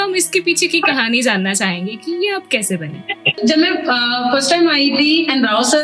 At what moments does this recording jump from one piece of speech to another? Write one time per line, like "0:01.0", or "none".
0:03.4